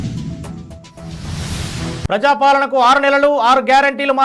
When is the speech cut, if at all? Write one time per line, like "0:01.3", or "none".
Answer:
none